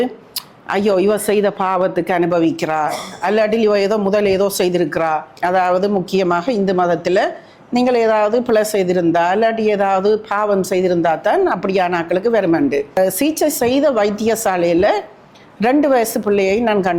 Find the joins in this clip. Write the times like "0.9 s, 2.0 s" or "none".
5.3 s, 13.0 s